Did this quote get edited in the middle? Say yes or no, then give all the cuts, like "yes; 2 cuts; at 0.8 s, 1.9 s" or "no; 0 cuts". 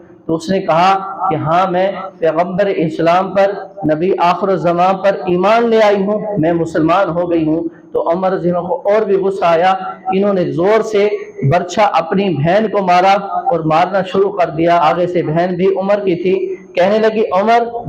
yes; 1 cut; at 14.8 s